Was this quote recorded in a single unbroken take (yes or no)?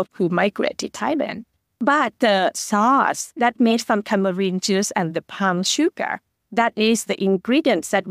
yes